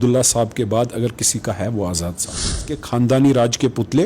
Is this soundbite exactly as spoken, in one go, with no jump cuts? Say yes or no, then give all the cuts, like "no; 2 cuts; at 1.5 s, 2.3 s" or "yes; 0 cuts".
no; 1 cut; at 2.8 s